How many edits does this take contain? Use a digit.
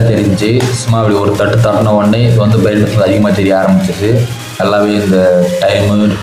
1